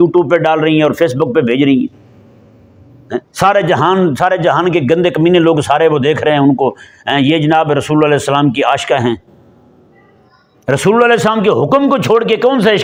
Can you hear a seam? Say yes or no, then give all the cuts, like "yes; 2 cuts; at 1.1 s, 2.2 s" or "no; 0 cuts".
no; 0 cuts